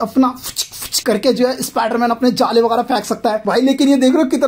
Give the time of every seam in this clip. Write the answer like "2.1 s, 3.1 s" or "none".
3.4 s